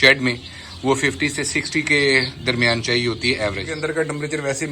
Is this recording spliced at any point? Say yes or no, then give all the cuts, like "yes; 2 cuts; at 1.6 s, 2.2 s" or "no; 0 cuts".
yes; 1 cut; at 3.7 s